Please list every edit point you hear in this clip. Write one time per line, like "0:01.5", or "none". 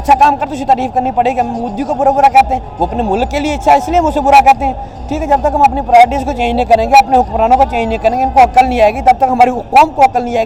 none

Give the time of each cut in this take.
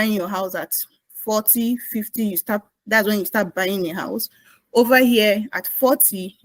none

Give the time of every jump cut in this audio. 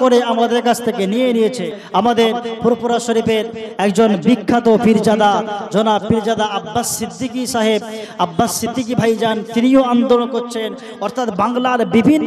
0:01.7

